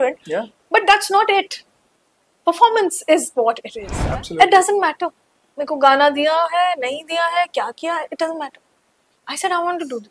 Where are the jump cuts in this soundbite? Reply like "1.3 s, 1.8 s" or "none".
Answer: 4.0 s